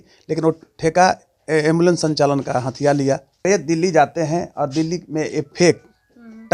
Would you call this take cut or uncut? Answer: cut